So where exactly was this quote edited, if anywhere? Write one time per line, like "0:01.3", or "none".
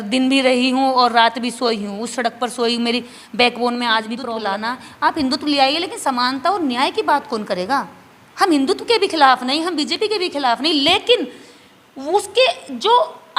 0:04.3